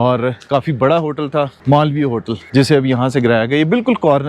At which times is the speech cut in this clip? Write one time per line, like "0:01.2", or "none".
0:01.6
0:02.4